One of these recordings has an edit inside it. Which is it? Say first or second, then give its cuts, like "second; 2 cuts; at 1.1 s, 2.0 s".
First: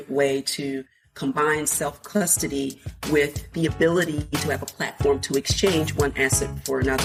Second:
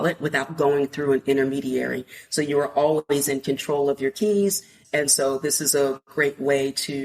second; 1 cut; at 4.7 s